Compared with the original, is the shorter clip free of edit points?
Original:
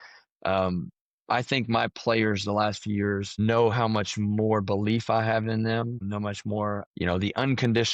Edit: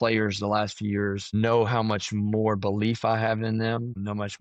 yes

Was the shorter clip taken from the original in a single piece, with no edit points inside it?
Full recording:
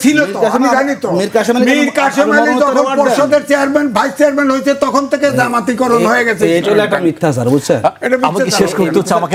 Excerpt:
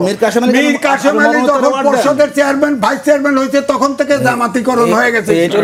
yes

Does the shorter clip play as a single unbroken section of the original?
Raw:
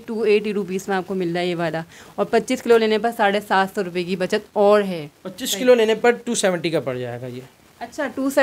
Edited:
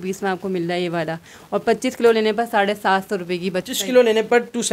no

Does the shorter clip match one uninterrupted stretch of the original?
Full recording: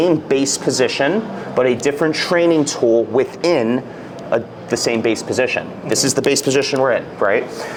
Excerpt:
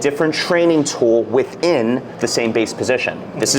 no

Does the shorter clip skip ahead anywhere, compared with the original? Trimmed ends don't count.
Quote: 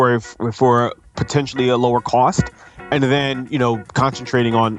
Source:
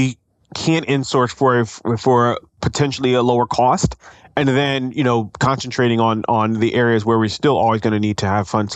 no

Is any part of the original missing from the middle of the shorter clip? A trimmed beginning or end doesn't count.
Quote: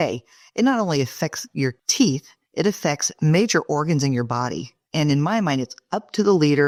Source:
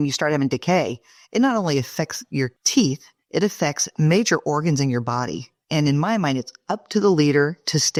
no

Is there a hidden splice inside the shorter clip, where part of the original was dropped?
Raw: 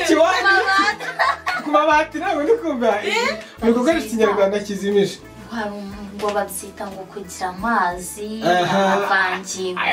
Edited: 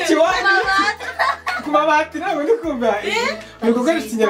no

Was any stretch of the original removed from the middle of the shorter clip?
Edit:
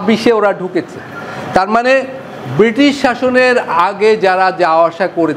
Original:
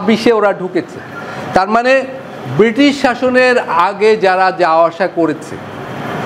no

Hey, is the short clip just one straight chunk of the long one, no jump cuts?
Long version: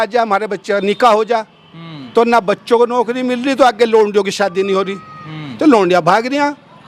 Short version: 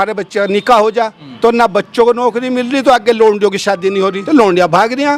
no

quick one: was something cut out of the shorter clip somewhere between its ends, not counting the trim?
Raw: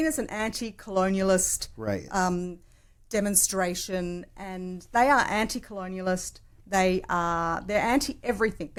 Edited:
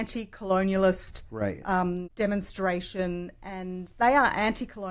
yes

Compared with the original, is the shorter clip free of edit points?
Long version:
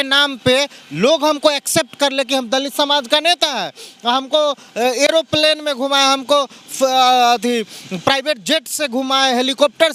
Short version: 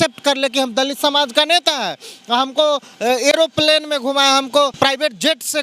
no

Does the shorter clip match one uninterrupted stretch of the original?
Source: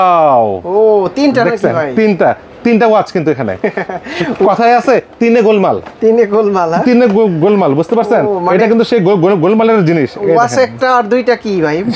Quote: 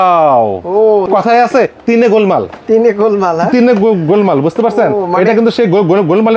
no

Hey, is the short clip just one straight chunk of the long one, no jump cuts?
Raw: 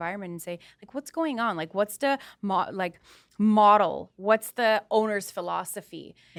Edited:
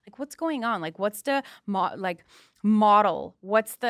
yes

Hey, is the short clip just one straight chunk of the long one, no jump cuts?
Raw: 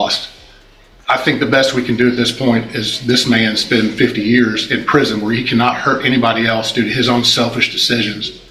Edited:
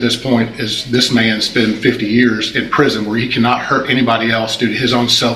yes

